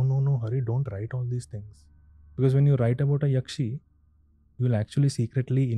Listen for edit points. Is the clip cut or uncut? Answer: uncut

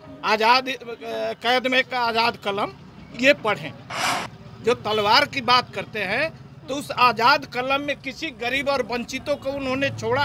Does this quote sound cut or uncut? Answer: uncut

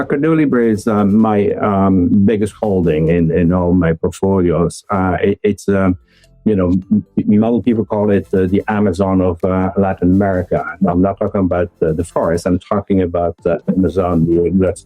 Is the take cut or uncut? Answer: uncut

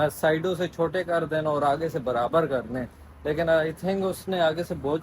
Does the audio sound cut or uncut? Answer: cut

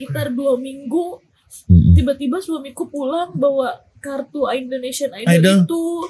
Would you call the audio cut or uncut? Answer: uncut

